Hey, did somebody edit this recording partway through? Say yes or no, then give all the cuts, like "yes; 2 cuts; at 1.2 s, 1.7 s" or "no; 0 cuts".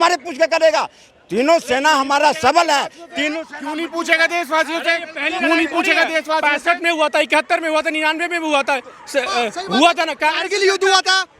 no; 0 cuts